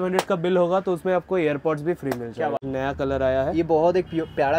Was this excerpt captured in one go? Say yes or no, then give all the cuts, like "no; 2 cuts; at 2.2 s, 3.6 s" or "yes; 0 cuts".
no; 1 cut; at 2.6 s